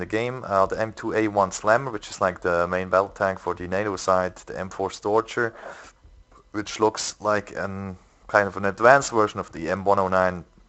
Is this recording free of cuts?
yes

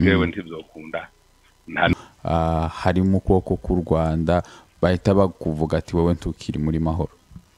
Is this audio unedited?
no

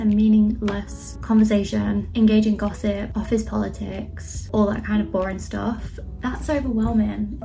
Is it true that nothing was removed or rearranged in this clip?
yes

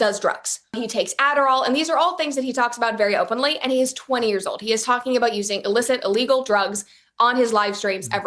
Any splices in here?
no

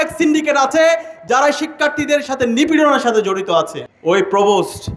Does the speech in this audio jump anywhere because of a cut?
yes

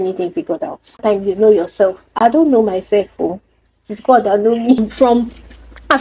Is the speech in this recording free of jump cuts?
no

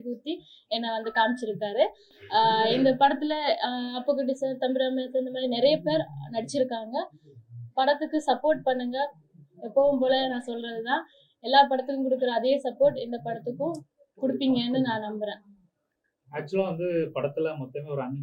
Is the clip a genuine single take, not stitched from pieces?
yes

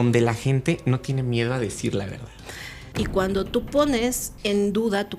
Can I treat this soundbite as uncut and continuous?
no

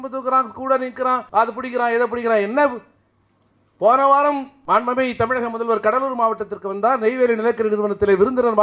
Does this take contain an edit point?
yes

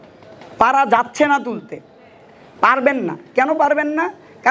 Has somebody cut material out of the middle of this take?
no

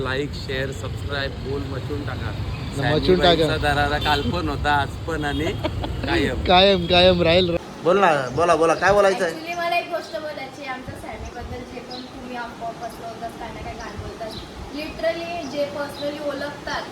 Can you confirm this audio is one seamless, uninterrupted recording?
no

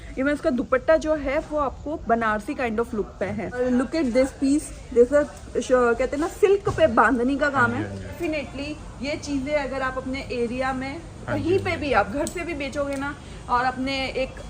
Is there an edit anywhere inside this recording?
yes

